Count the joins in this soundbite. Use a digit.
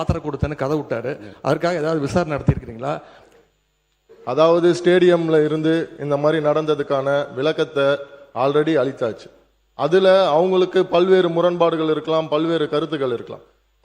1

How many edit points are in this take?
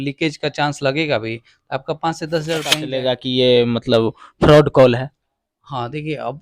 1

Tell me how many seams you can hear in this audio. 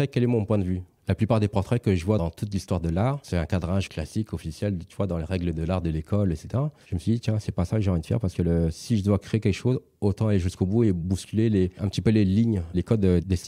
1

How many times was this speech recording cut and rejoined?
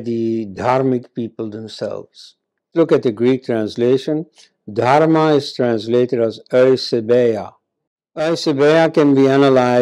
1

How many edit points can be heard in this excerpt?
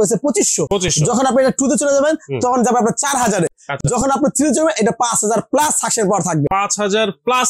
0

